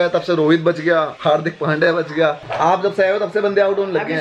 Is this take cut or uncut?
uncut